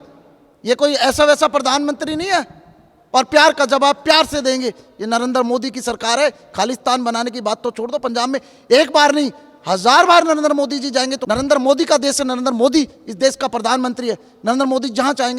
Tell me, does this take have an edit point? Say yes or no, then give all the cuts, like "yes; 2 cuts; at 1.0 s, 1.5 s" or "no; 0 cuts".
no; 0 cuts